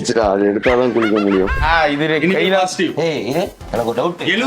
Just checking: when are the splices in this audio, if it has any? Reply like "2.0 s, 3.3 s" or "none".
1.6 s

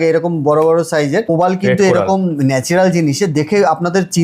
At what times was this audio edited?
1.3 s

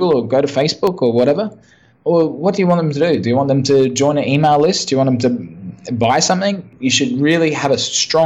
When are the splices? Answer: 6.7 s

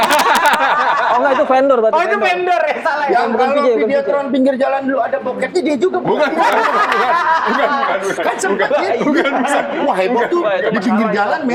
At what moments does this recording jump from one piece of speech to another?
none

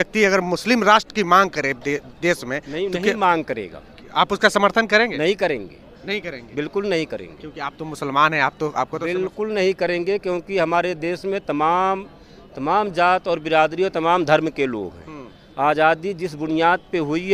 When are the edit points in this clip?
none

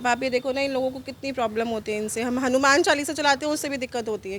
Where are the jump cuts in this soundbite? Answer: none

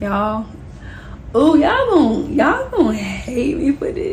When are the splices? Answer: none

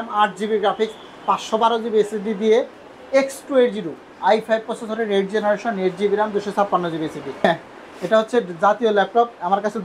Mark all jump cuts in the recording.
2.8 s, 7.4 s

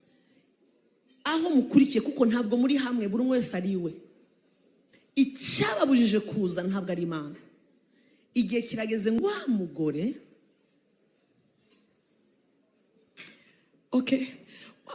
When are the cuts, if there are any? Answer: 9.2 s

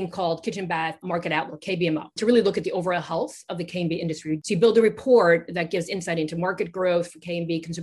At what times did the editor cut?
1.0 s, 2.2 s, 4.4 s

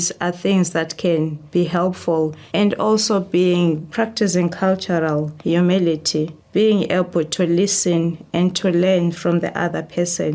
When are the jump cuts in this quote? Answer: 1.4 s, 2.4 s, 3.9 s, 5.3 s, 6.4 s

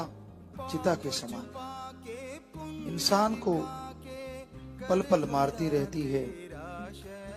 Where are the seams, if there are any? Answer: 6.3 s

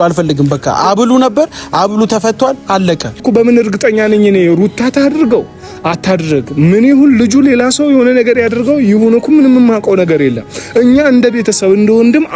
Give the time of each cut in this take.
3.2 s

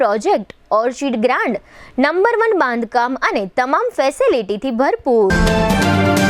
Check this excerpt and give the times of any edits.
5.3 s

